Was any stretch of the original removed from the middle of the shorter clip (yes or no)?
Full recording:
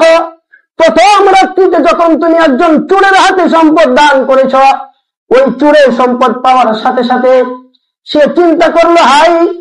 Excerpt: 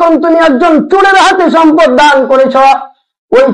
no